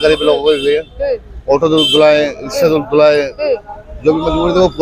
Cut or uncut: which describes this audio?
uncut